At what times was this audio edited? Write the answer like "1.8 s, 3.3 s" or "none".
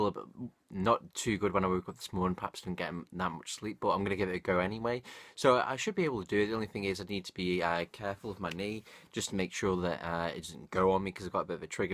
none